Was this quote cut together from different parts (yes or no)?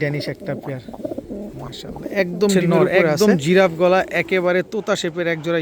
yes